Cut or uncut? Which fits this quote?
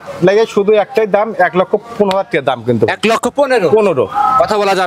uncut